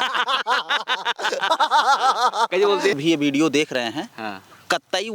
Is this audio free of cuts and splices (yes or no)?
no